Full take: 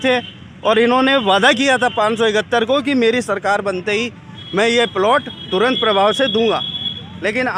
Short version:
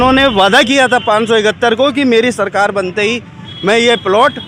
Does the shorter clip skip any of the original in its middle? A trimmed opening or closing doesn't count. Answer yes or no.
no